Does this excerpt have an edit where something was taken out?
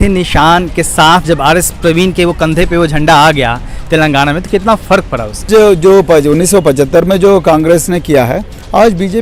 yes; 1 cut; at 5.4 s

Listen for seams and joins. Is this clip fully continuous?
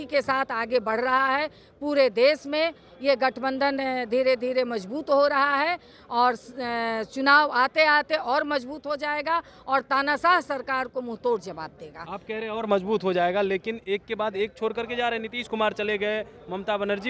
yes; 0 cuts

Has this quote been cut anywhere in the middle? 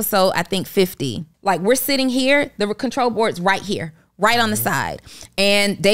yes; 1 cut; at 1.3 s

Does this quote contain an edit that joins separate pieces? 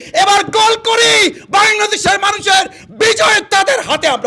no; 0 cuts

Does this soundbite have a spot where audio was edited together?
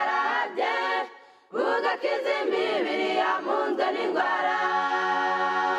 no; 0 cuts

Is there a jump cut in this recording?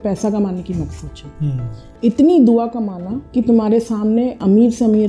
no; 0 cuts

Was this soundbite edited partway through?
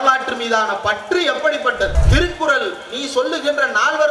yes; 1 cut; at 2.0 s

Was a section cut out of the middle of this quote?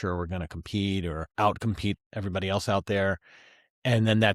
yes; 2 cuts; at 1.3 s, 2.0 s

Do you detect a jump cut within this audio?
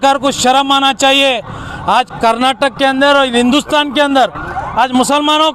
no; 0 cuts

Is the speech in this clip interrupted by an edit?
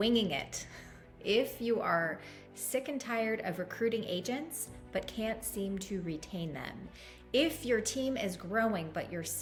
no; 0 cuts

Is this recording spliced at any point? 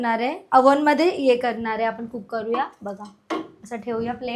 no; 0 cuts

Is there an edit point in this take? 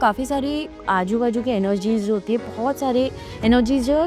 no; 0 cuts

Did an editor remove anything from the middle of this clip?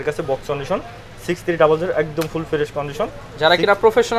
no; 0 cuts

